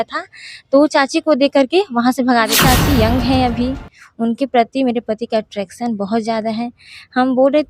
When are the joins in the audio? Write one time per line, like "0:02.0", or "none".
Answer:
0:02.6